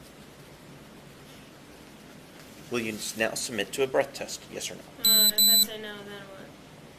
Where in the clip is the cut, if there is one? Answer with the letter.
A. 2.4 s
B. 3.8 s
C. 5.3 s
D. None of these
A